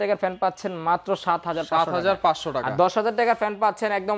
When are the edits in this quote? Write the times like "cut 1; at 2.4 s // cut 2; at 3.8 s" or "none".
none